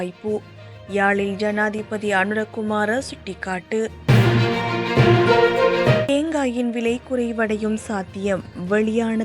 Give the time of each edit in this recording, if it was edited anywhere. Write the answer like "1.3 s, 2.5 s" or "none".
4.0 s, 6.1 s